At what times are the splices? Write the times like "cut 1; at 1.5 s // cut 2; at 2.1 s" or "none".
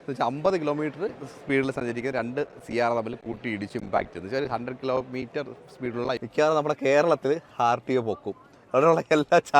cut 1; at 6.2 s